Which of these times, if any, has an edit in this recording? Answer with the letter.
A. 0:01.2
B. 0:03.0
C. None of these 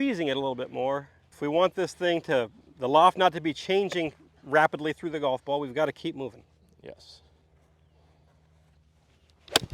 A